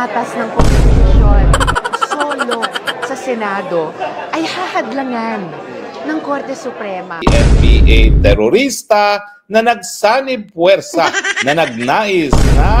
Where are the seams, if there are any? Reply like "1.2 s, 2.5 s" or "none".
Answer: 7.1 s